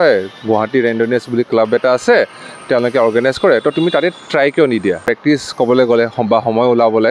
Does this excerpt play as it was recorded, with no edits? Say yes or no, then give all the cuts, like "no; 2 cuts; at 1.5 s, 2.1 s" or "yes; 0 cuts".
no; 1 cut; at 5.0 s